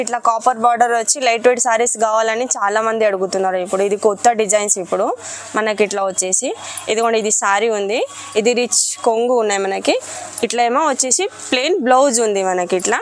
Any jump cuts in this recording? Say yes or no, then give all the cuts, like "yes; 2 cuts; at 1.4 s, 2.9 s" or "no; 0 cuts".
no; 0 cuts